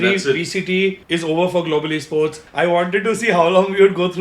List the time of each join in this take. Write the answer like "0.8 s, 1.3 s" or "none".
1.0 s, 2.4 s